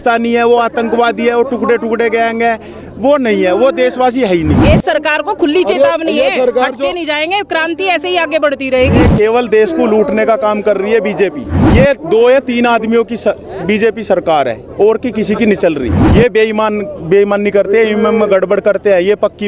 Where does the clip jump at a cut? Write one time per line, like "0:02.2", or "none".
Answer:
0:04.6
0:09.0
0:11.6
0:16.0